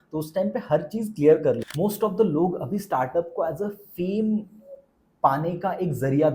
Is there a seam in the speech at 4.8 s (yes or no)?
no